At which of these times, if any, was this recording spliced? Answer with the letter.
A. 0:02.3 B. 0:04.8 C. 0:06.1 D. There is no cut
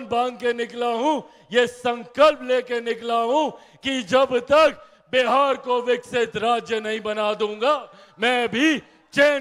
D